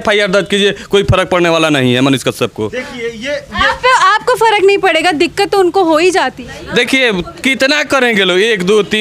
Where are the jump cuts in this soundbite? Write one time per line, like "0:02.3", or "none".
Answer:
none